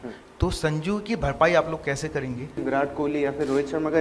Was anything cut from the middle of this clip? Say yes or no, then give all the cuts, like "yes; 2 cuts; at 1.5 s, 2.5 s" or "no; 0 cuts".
yes; 1 cut; at 2.6 s